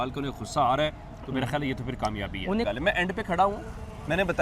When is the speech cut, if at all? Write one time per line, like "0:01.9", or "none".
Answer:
0:02.6